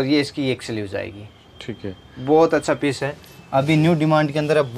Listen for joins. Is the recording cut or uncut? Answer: uncut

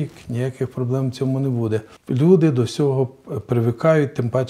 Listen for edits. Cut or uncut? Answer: cut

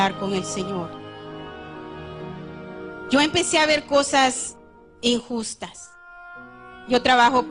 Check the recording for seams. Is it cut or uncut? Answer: uncut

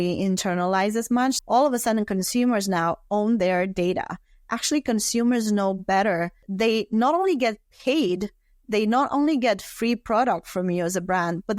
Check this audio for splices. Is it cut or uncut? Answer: cut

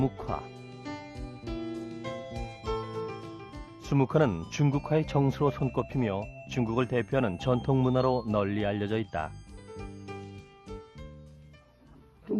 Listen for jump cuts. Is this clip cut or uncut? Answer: uncut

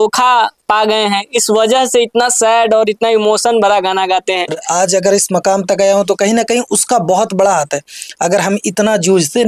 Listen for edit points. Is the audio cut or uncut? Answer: cut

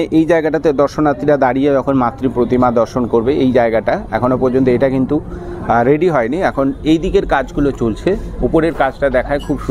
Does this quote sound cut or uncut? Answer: uncut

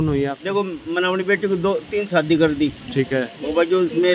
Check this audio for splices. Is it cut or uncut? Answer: uncut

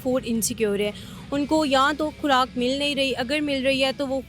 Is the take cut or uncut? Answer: uncut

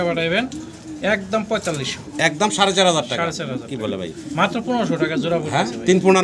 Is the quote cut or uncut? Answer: uncut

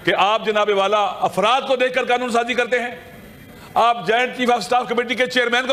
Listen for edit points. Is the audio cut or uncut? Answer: uncut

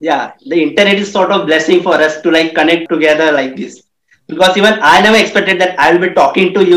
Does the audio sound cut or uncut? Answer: cut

